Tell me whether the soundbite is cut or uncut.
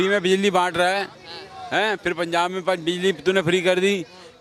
uncut